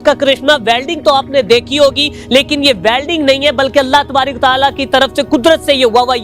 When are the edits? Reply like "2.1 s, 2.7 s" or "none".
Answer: none

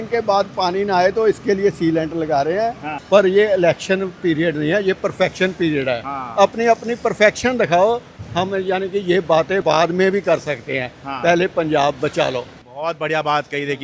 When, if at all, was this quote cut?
2.9 s, 9.6 s, 12.6 s

